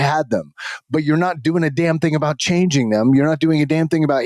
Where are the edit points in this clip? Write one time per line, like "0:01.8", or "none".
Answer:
none